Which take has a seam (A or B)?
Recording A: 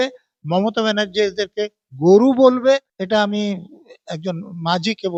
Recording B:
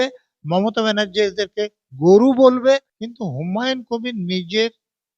B